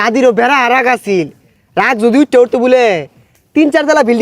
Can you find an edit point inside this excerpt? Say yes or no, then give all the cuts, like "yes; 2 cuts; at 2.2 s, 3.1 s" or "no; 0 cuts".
no; 0 cuts